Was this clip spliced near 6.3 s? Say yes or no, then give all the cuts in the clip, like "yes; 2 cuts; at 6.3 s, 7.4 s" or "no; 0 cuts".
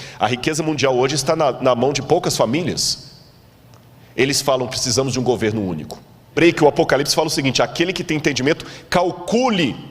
yes; 1 cut; at 6.3 s